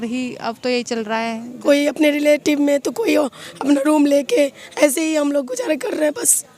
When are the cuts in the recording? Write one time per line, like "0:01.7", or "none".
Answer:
0:01.5